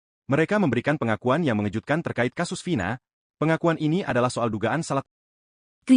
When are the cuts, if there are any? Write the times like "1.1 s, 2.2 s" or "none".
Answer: 5.0 s